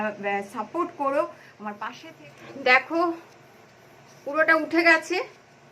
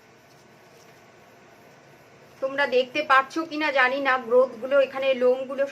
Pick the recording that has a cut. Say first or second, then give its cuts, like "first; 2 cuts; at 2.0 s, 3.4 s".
first; 1 cut; at 1.8 s